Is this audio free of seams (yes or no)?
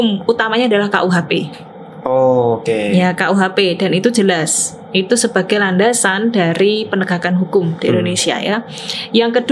yes